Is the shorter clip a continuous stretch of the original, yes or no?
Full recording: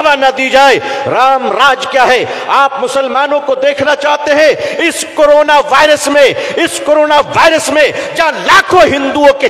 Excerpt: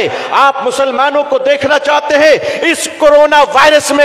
yes